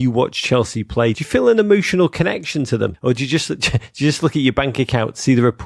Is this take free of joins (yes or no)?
no